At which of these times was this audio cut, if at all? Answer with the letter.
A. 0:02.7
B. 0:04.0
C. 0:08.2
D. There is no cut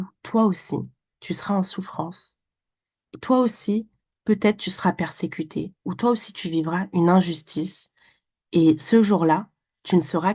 D